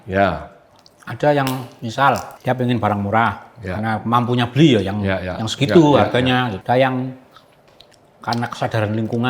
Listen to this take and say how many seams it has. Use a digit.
2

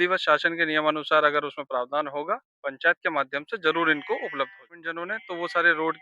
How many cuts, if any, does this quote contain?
1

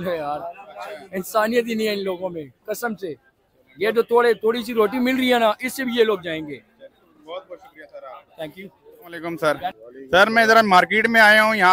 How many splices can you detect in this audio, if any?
0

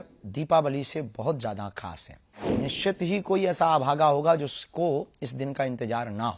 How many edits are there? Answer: 1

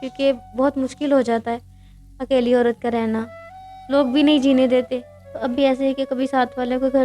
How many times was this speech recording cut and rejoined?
1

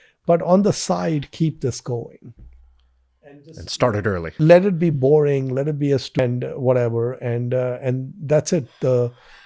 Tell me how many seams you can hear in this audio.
1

